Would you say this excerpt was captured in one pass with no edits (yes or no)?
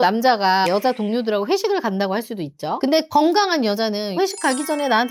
yes